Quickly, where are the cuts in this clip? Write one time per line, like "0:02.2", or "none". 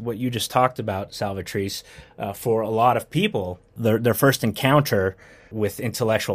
0:03.8